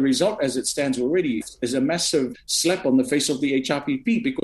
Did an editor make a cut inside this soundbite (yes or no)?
yes